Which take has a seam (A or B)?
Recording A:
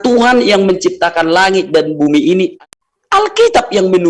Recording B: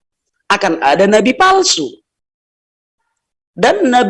A